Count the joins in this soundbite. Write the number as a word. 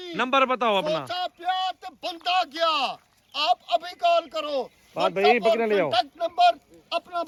zero